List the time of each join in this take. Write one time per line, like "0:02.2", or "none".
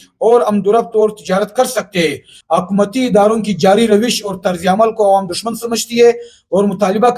0:02.3